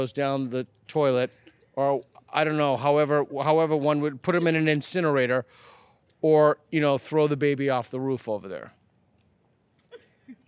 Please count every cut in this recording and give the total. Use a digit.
0